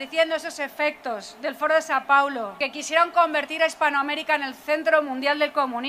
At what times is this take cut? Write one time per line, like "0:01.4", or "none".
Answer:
0:02.6